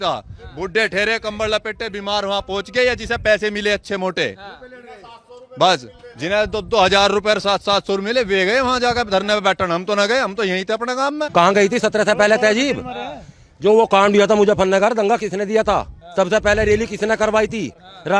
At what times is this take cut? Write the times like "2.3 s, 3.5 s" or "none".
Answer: 11.2 s